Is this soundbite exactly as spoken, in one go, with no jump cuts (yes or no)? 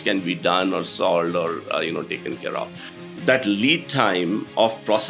no